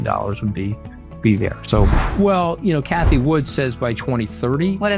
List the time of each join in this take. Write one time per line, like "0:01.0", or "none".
0:02.0